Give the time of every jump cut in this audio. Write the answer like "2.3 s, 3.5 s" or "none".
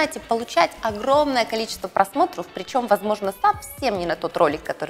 none